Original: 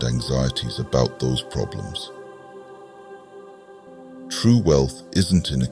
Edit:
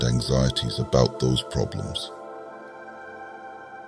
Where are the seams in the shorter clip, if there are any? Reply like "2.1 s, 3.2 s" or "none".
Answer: none